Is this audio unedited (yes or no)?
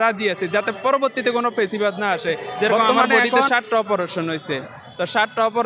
no